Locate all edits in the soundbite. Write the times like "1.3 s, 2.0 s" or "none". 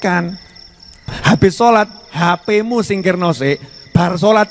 1.0 s